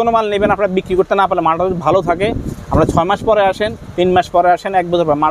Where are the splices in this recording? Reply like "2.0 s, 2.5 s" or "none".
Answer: none